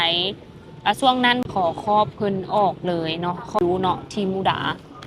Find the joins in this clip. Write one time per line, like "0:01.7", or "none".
0:01.4
0:03.6